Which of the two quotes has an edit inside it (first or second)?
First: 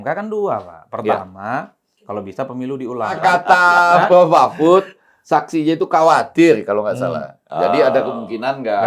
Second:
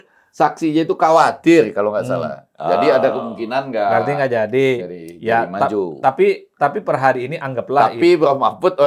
first